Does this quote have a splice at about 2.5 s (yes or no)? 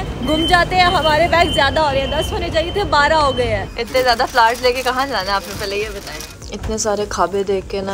no